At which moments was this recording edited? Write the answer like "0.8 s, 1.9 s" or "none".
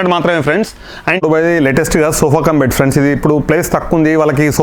1.2 s